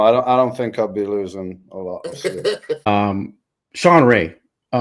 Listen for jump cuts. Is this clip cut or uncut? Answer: cut